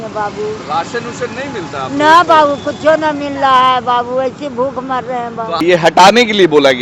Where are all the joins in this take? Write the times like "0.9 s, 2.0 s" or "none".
5.5 s